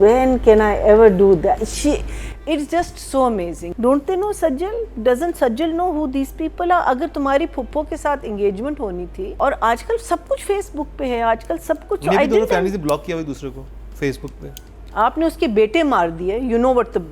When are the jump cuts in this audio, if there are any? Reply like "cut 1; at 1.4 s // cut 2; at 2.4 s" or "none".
cut 1; at 3.6 s // cut 2; at 9.3 s